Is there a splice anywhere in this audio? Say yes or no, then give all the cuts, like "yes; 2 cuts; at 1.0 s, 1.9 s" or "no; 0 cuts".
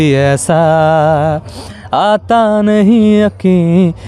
no; 0 cuts